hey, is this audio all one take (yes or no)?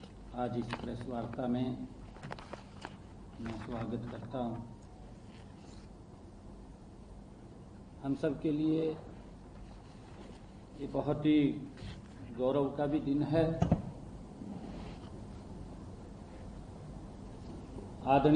yes